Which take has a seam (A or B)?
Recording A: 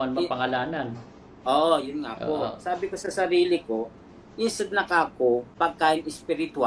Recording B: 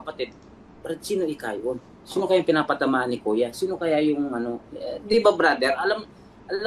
A